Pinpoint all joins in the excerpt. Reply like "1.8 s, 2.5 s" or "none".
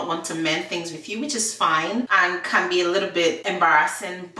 2.1 s, 3.4 s